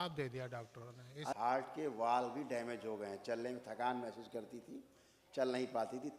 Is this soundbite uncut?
no; 1 cut; at 1.3 s

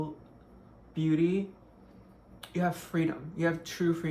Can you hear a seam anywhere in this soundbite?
no; 0 cuts

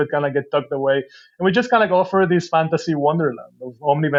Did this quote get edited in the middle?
no; 0 cuts

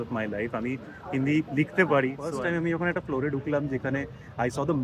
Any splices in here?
yes; 1 cut; at 2.3 s

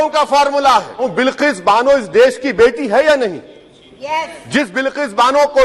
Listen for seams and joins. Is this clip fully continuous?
no; 1 cut; at 1.1 s

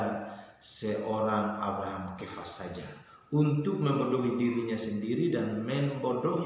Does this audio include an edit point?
no; 0 cuts

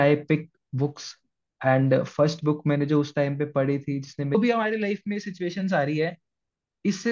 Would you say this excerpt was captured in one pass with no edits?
no; 1 cut; at 4.4 s

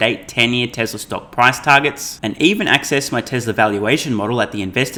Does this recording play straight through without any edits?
yes; 0 cuts

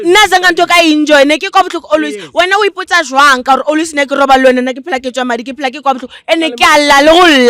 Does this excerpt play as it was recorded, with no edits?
yes; 0 cuts

